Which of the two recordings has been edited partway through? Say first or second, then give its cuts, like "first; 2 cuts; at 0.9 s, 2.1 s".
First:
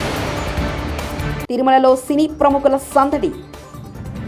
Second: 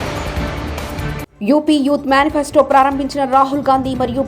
first; 1 cut; at 1.4 s